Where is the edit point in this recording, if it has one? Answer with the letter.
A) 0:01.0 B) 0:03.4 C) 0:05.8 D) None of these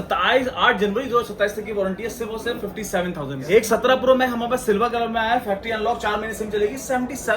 B